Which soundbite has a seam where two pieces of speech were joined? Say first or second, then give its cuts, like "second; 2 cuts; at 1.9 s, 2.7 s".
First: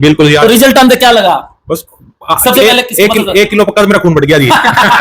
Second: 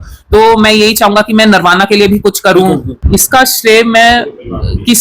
second; 1 cut; at 2.9 s